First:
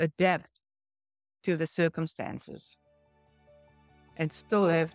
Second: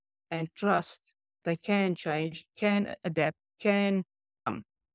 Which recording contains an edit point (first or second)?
second